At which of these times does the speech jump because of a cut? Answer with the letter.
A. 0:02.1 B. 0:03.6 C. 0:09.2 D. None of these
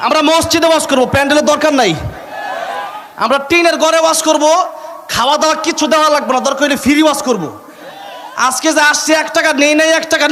D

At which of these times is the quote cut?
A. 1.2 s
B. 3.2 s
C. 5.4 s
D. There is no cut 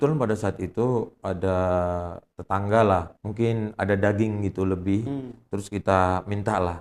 B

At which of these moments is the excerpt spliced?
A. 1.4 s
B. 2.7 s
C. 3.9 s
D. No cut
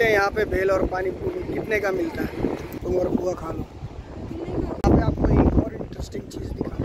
B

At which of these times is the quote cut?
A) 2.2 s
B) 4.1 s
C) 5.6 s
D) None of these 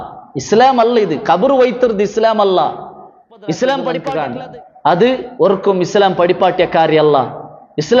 B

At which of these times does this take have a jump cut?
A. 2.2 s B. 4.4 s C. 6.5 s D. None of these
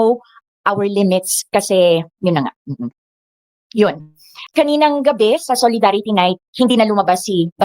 B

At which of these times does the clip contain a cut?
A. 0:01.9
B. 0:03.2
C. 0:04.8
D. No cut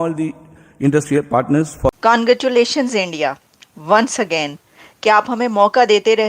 A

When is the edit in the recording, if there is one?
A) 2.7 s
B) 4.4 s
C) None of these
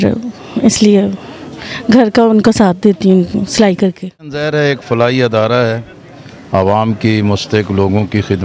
B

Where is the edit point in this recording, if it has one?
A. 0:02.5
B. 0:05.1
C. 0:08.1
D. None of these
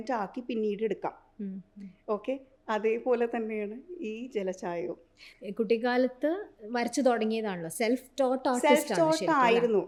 D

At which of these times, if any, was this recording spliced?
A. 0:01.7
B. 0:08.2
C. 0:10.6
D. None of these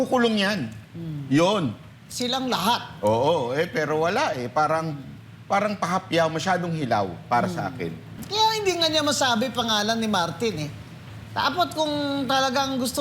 B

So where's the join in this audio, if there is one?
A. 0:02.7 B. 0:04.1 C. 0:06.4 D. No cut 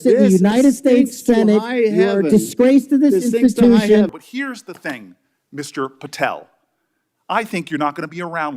B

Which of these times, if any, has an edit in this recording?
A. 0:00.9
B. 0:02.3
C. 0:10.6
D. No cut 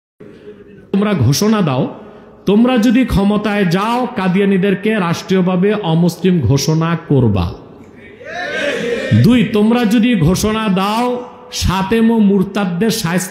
A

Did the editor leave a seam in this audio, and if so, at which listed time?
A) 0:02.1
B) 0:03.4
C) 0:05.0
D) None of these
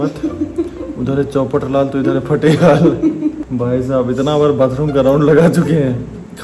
D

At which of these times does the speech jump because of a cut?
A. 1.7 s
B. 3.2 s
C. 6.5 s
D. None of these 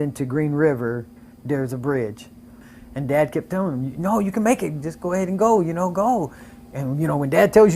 B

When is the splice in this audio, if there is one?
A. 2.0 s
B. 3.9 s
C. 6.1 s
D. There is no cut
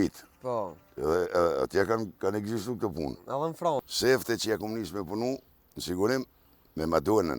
B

